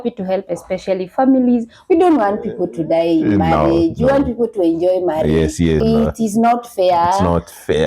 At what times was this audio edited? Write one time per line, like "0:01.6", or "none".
0:05.8

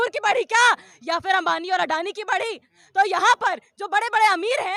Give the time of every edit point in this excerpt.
none

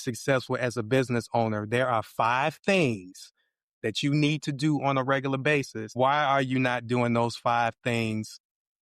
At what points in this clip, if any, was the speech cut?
0:05.8

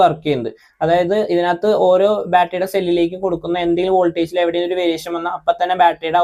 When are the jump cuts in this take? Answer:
none

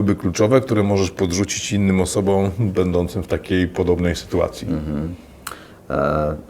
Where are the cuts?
none

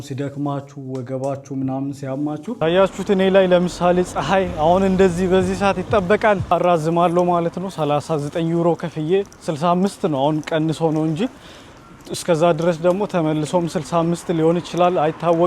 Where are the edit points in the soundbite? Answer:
0:02.6
0:06.5

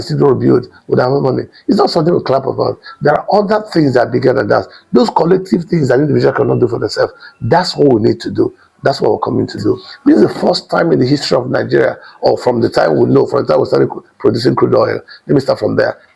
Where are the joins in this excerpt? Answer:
0:09.9

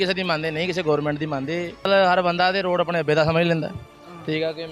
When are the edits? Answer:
0:01.9

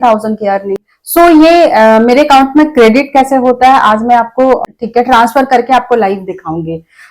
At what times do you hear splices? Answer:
0:00.9
0:04.6

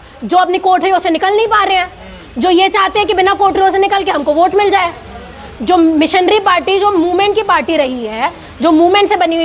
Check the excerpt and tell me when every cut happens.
none

